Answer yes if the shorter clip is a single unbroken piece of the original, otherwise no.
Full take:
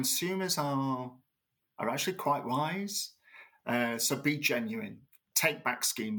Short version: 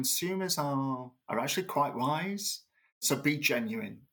no